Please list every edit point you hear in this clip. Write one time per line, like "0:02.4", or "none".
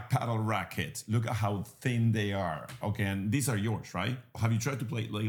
0:04.3